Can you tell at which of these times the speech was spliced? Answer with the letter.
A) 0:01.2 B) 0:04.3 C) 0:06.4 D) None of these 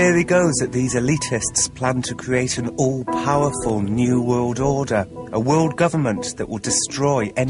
D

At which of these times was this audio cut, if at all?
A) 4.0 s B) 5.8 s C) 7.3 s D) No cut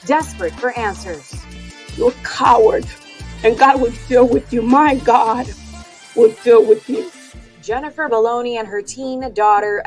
C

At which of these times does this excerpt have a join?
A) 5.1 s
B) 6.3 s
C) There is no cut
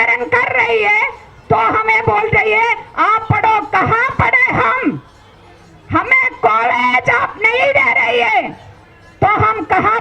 C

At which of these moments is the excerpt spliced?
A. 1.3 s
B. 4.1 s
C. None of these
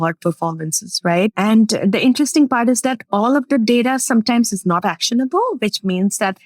A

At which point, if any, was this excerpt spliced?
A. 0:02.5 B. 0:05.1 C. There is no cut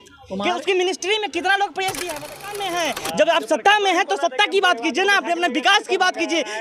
A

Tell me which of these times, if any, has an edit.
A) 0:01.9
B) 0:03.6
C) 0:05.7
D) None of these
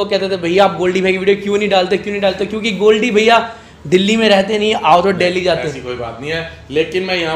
D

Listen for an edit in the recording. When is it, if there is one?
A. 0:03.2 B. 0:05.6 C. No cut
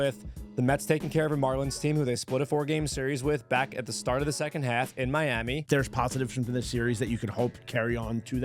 B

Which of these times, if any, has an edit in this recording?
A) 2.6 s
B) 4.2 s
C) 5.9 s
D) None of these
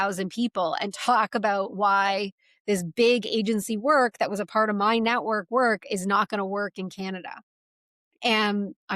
D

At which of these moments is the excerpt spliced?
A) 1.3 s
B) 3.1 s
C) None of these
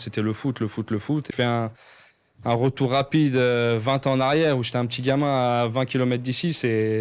A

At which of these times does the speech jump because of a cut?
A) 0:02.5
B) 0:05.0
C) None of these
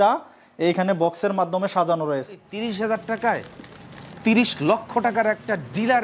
A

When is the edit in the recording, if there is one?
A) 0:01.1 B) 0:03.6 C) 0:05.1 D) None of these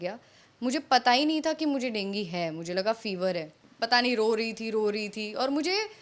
B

